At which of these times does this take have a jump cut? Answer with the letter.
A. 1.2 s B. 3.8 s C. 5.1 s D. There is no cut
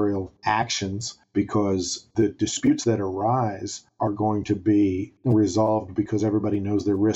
C